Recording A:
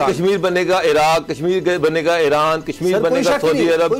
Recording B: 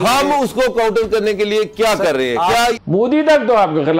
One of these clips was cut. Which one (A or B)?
B